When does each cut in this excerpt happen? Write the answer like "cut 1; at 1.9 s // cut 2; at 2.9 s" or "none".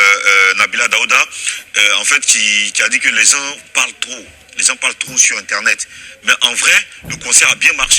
none